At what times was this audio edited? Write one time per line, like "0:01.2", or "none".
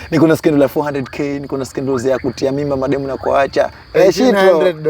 0:03.8